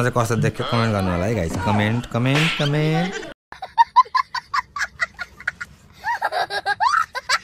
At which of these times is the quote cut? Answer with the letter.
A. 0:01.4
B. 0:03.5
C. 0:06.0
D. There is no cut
B